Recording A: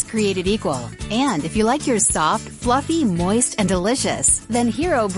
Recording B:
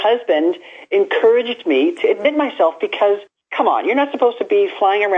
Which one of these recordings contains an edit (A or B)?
B